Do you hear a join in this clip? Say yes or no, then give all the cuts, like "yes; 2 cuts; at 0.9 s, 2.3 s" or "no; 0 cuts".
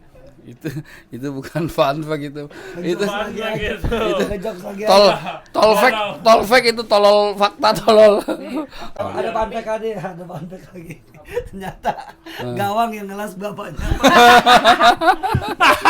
yes; 1 cut; at 9.0 s